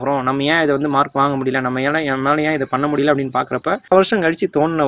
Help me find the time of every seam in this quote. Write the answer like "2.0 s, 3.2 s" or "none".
3.9 s